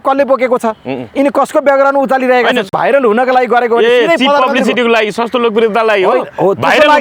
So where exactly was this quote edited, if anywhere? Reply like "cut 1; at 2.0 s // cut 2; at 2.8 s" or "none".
cut 1; at 2.7 s

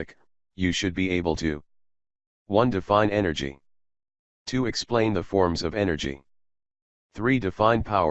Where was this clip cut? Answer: cut 1; at 2.8 s

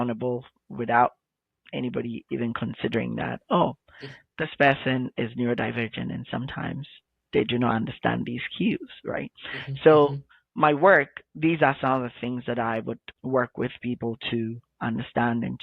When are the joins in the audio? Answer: cut 1; at 13.1 s

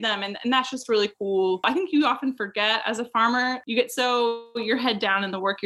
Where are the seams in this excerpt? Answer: cut 1; at 1.6 s // cut 2; at 3.6 s

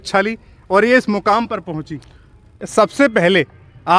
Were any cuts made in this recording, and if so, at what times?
cut 1; at 2.6 s

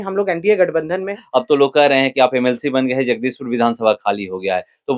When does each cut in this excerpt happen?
cut 1; at 1.2 s

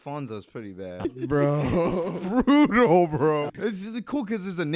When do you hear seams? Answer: cut 1; at 1.0 s // cut 2; at 3.5 s

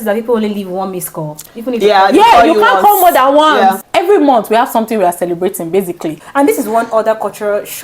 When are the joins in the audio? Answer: cut 1; at 3.8 s // cut 2; at 6.2 s

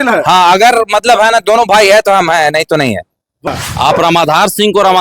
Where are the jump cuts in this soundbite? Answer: cut 1; at 3.5 s

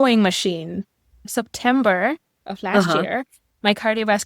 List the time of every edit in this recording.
cut 1; at 1.3 s

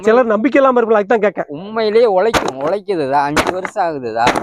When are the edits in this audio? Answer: none

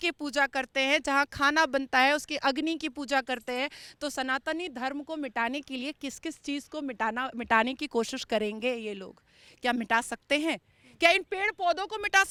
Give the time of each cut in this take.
none

